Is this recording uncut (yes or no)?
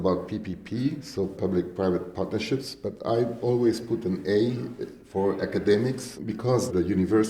no